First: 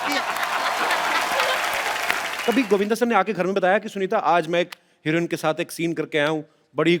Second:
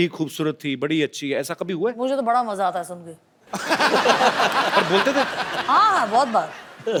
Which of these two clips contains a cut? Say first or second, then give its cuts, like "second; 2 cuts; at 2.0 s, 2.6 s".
first; 1 cut; at 2.3 s